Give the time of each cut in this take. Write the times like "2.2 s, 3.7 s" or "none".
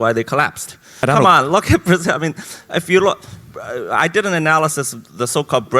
0.9 s